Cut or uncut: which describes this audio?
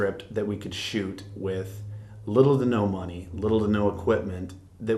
uncut